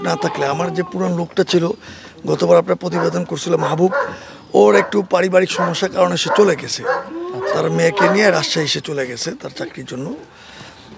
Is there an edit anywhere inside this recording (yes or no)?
no